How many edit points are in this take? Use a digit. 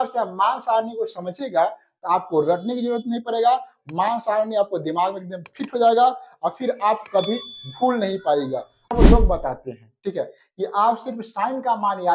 1